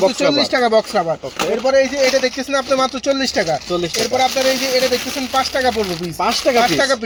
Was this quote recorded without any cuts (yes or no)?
yes